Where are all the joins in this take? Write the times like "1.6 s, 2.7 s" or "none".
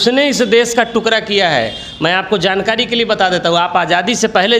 none